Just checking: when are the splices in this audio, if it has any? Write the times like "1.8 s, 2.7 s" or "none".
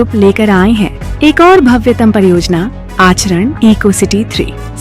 1.0 s